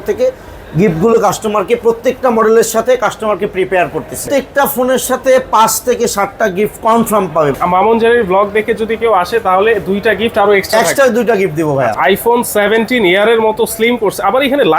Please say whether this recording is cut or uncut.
cut